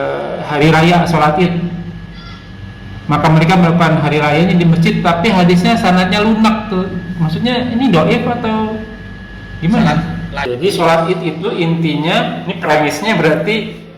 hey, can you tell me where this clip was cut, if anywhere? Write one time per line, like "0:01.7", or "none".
0:10.4